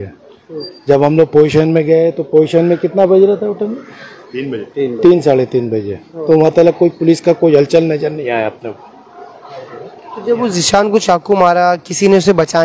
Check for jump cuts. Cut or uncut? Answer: uncut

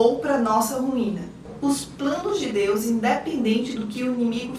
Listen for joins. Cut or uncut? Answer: cut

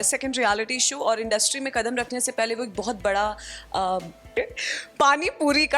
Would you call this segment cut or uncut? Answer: cut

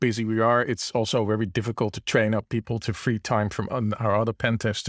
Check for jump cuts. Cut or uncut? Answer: uncut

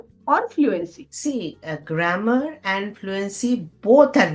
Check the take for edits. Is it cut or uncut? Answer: uncut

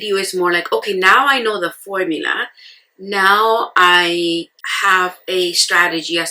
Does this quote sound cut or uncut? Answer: cut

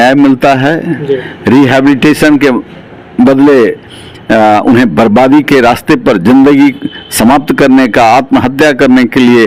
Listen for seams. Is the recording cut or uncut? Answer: uncut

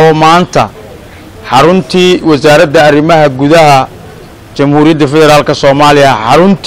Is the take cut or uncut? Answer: uncut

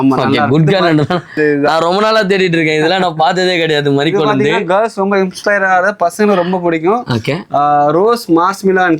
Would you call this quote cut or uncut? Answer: cut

